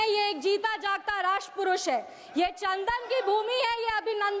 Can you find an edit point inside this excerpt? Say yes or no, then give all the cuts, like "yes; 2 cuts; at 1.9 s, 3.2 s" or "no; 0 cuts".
no; 0 cuts